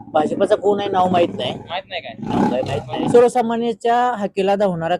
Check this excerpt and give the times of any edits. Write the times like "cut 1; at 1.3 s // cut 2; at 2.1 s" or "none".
cut 1; at 3.1 s